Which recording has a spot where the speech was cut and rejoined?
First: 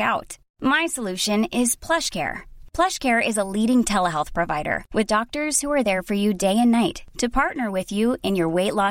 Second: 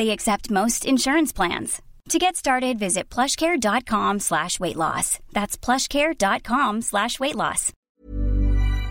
second; 1 cut; at 8.0 s

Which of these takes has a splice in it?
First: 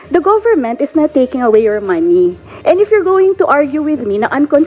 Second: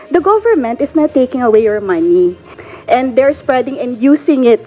second; 1 cut; at 2.5 s

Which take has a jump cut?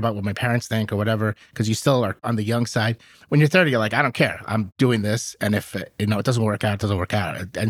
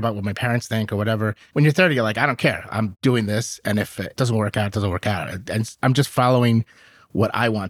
second; 2 cuts; at 1.4 s, 4.2 s

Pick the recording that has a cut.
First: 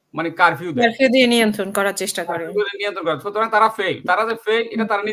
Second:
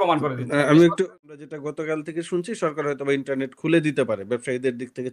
second; 1 cut; at 1.0 s

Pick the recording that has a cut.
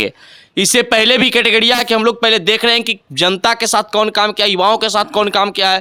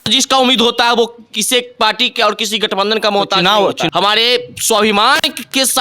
second; 1 cut; at 3.9 s

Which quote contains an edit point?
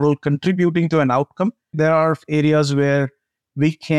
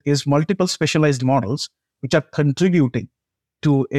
first; 1 cut; at 1.7 s

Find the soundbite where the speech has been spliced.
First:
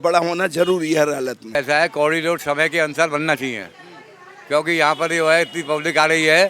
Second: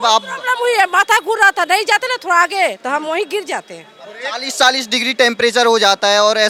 first; 1 cut; at 1.6 s

